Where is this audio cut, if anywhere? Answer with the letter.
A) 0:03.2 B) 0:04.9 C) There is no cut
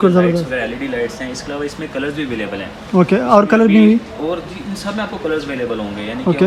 C